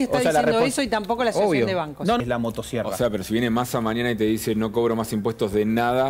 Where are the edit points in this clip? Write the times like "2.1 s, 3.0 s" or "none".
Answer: 2.2 s